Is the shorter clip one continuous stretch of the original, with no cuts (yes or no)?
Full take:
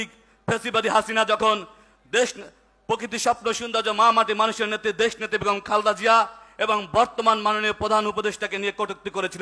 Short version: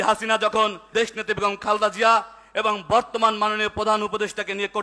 no